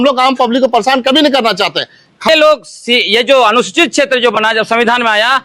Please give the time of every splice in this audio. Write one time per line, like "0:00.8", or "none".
0:02.3